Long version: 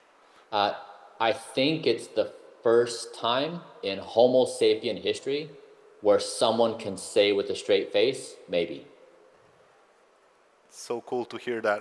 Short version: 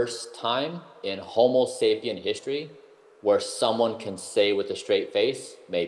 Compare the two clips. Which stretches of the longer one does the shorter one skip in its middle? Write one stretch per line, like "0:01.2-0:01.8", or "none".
none